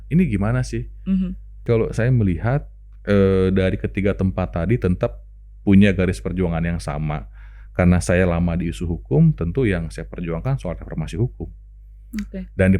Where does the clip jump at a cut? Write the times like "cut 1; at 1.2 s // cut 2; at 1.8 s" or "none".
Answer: cut 1; at 1.6 s

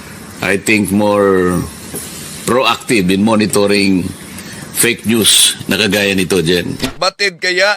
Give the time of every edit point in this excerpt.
cut 1; at 6.8 s

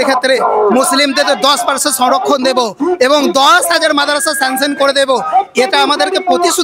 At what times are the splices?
none

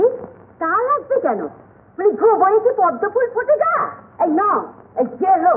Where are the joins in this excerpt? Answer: none

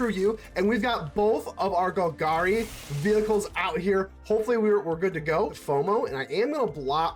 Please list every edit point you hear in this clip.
cut 1; at 5.6 s

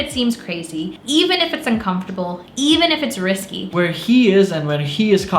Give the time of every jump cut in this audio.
cut 1; at 0.9 s // cut 2; at 2.4 s // cut 3; at 3.7 s

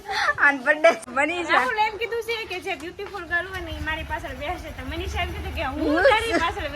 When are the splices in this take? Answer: cut 1; at 1.0 s

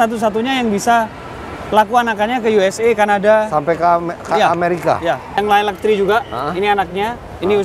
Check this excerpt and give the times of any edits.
cut 1; at 5.3 s

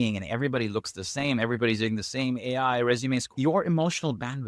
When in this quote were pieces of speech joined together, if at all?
cut 1; at 3.3 s

